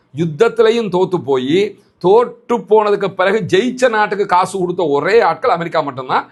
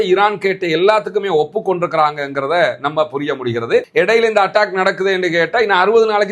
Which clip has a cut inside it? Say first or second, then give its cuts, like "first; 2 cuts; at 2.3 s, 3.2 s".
second; 1 cut; at 3.9 s